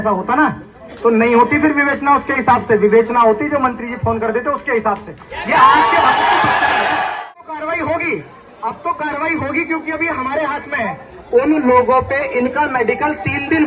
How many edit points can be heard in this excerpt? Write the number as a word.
two